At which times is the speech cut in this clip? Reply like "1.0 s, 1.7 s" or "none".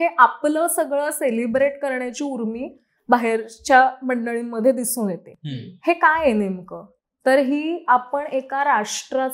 none